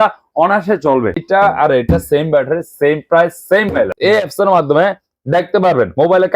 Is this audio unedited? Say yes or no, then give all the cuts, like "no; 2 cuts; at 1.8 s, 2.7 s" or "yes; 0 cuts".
no; 2 cuts; at 1.2 s, 3.9 s